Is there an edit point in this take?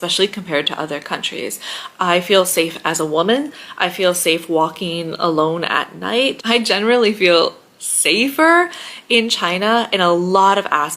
no; 0 cuts

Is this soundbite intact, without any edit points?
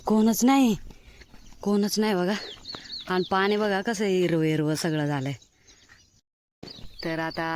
no; 1 cut; at 6.1 s

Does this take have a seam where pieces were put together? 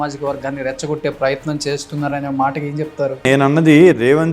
yes; 1 cut; at 3.2 s

